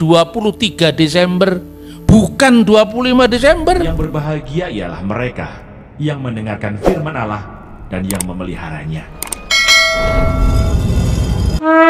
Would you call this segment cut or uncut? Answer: cut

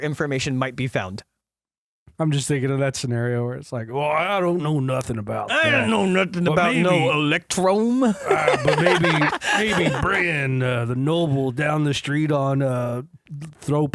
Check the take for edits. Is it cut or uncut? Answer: uncut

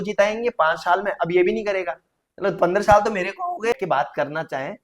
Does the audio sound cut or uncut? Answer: cut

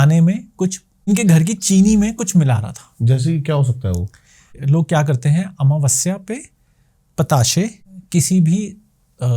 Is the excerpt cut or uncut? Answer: cut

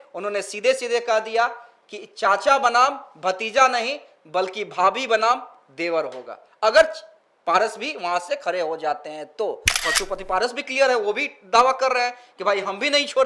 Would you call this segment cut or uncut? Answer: cut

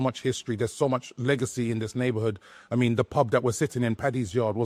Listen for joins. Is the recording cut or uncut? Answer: uncut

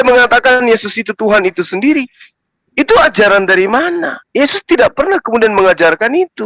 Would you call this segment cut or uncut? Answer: uncut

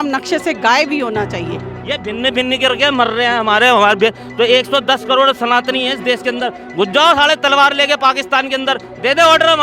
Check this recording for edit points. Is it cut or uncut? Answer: cut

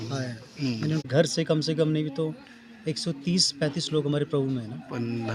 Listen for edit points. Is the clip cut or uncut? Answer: cut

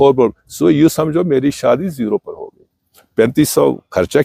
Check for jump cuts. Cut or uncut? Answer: uncut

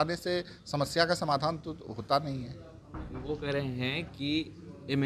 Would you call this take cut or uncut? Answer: uncut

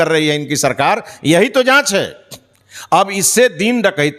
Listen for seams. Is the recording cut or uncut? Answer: uncut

